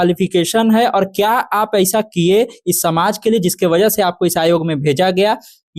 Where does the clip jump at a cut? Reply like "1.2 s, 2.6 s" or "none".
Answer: none